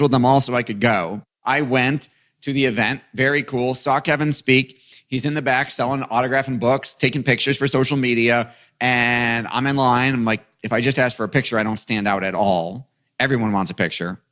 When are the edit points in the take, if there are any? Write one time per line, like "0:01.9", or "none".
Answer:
none

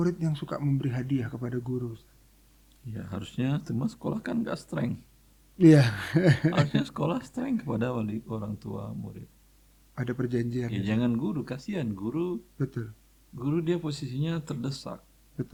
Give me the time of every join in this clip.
none

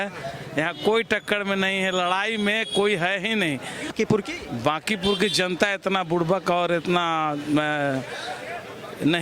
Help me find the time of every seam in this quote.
0:03.9

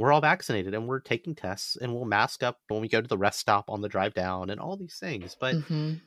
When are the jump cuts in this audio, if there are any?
none

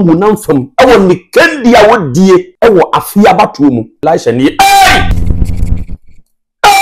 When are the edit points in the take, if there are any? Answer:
0:02.5
0:04.0
0:05.1

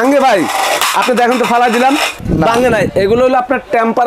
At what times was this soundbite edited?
0:02.2

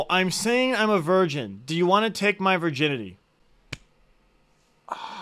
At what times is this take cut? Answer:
none

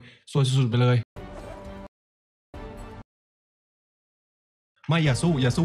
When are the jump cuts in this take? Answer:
0:01.1

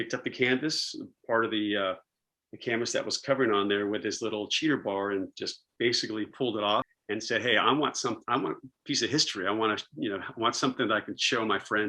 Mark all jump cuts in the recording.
0:07.0

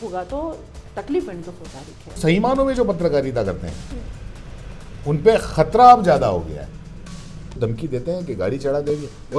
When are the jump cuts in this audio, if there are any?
0:02.2
0:07.6

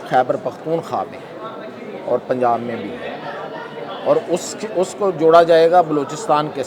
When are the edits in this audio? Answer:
none

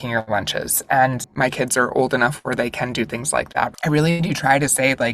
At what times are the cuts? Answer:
0:01.3
0:03.7

